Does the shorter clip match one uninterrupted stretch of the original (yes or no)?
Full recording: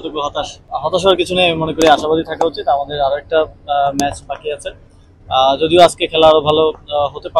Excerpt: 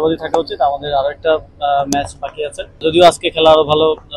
no